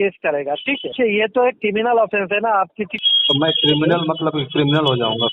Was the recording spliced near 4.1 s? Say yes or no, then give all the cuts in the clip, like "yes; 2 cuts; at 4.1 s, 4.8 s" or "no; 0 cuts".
no; 2 cuts; at 0.9 s, 2.9 s